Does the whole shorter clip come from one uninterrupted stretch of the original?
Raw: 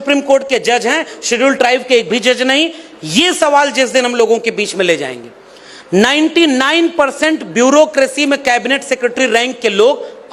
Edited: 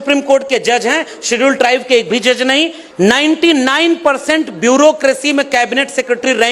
no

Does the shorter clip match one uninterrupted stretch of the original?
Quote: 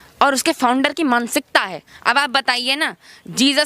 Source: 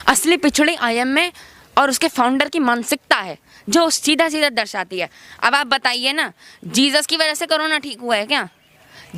no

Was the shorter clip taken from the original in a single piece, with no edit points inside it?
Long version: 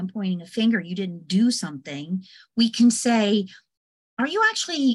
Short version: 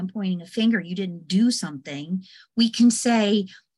yes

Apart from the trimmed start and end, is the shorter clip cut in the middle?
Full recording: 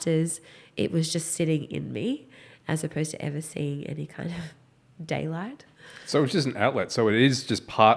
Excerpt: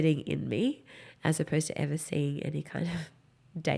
no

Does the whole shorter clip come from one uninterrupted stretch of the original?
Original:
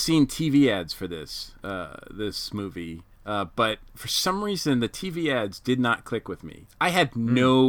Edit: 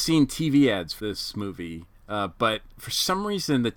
no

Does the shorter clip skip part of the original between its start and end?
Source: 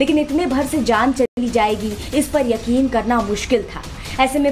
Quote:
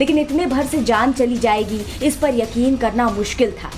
yes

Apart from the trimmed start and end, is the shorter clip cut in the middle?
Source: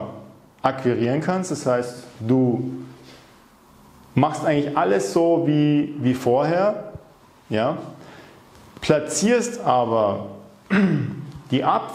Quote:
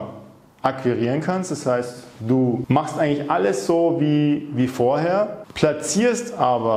yes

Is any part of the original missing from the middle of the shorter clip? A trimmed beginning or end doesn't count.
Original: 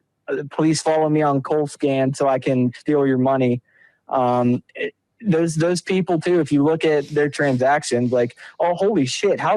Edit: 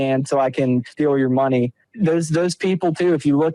yes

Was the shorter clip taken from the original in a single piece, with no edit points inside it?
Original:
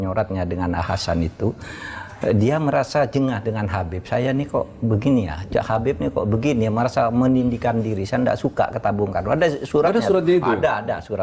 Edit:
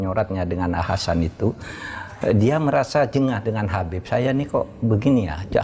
yes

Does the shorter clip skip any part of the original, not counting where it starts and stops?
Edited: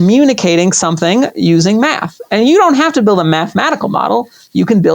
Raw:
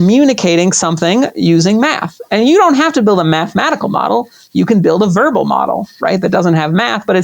no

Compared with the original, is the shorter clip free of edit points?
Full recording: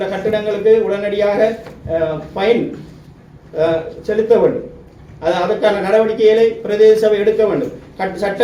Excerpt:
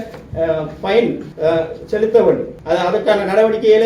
no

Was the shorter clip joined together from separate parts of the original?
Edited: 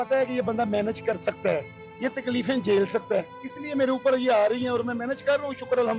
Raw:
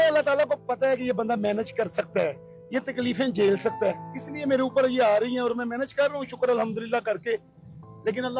no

